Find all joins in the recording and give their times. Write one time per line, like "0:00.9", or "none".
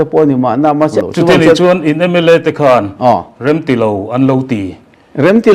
0:01.0